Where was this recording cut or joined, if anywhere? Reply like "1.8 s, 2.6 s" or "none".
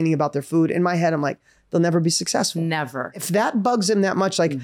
3.2 s